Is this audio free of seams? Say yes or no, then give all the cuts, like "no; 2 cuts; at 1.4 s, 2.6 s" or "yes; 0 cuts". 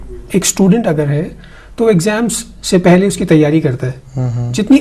no; 1 cut; at 3.5 s